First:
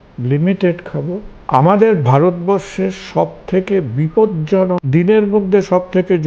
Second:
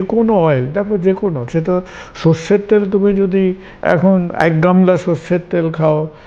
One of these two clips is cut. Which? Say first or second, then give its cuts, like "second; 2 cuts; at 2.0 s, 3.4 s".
first; 2 cuts; at 1.3 s, 4.8 s